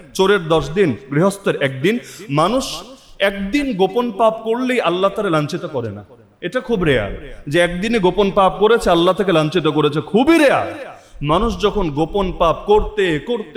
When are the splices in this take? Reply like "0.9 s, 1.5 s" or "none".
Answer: none